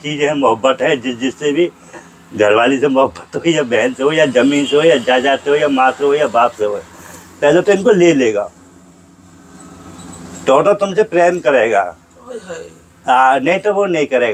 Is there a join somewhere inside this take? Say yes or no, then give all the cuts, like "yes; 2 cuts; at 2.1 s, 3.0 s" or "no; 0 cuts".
no; 0 cuts